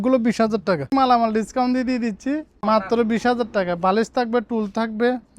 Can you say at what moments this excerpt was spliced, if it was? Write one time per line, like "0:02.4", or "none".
0:00.9
0:02.6